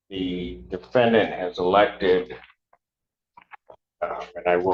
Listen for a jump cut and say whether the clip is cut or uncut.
uncut